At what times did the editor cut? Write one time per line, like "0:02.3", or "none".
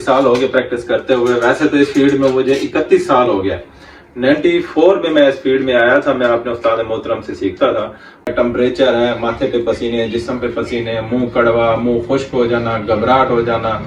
0:08.3